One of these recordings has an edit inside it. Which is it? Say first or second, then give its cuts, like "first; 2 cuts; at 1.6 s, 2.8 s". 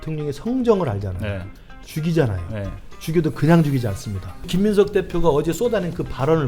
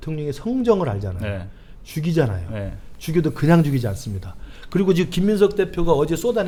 first; 1 cut; at 4.5 s